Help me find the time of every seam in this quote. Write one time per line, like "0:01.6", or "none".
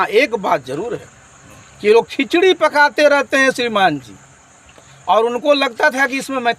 none